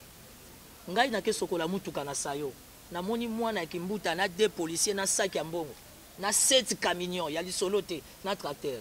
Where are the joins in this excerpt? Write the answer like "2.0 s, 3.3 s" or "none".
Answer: none